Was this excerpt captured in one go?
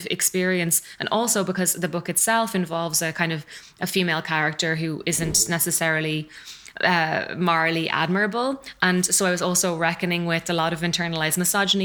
yes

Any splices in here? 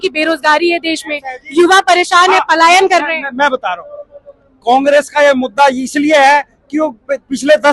no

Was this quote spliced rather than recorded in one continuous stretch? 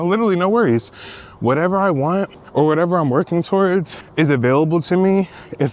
yes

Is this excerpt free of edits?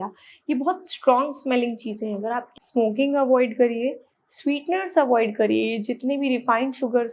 no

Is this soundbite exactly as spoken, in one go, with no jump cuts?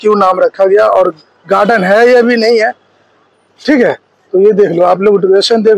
yes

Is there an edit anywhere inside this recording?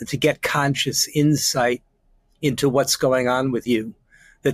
no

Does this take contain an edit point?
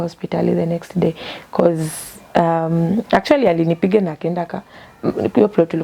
no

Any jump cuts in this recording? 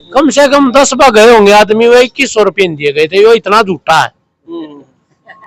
no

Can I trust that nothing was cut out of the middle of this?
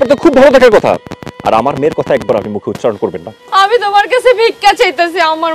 no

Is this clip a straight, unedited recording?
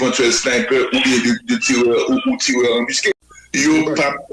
no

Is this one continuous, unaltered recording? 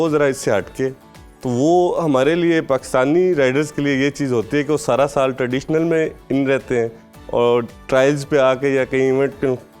yes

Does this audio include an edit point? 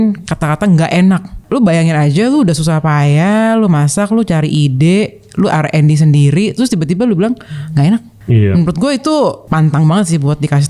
yes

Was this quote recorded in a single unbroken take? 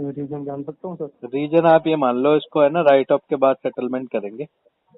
yes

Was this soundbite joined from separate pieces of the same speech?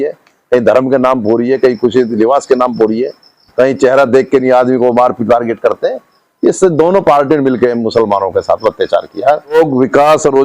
yes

